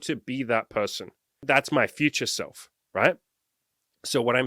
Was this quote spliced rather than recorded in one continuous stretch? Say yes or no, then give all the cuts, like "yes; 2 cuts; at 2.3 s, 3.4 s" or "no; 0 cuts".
yes; 1 cut; at 1.4 s